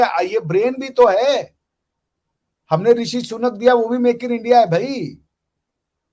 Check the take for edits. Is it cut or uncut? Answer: uncut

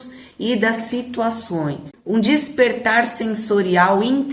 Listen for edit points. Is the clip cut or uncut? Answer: cut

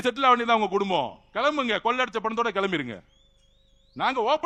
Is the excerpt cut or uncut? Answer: uncut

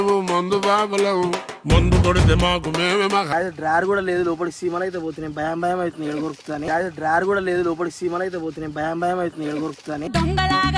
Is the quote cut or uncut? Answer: cut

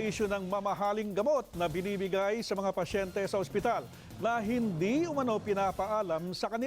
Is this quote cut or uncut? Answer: cut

